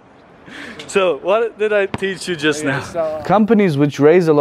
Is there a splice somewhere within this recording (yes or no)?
yes